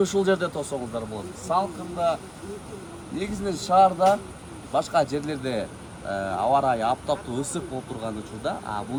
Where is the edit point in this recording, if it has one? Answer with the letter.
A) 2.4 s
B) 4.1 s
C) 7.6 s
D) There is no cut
D